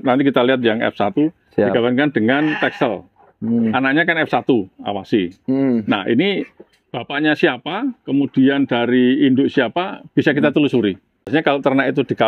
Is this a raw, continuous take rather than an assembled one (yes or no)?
no